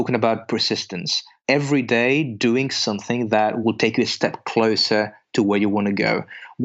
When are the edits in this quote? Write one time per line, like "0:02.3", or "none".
0:01.4
0:03.6